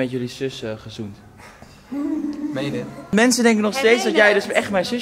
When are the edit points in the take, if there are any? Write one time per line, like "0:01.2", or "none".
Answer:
0:03.1